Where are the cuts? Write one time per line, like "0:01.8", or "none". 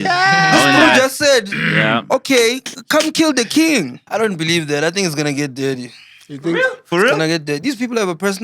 0:04.0